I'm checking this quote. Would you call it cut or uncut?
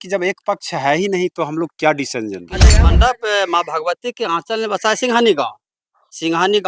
cut